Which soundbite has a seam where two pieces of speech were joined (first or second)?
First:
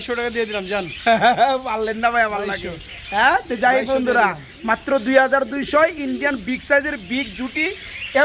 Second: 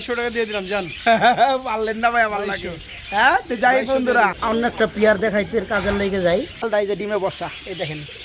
second